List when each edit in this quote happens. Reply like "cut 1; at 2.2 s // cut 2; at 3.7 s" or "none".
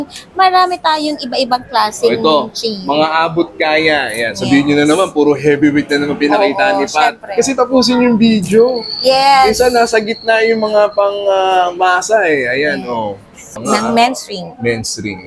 cut 1; at 13.5 s